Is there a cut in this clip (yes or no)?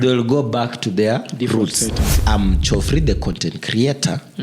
yes